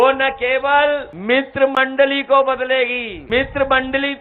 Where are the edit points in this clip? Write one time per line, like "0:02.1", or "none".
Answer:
0:01.1
0:03.1